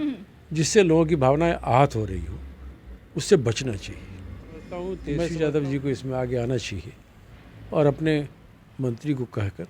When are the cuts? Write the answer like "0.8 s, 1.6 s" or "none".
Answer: 5.1 s